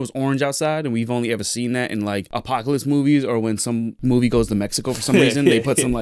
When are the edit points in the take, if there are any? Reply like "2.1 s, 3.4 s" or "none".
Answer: none